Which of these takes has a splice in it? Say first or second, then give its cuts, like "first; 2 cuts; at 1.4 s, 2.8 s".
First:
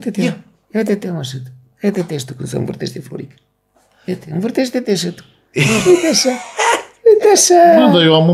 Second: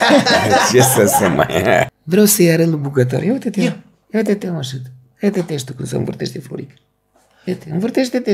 second; 1 cut; at 2.0 s